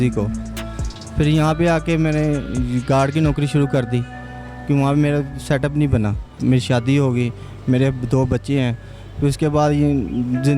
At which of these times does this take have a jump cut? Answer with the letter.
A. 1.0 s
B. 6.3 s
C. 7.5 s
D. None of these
B